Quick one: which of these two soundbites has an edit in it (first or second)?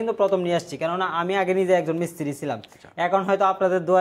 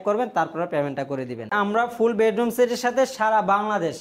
second